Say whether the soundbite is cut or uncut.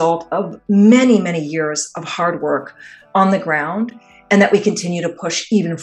uncut